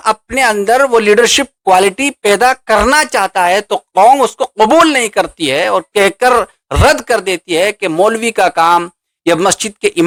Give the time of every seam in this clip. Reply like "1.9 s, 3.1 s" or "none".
none